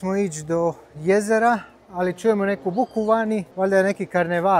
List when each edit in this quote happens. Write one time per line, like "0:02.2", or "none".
0:03.5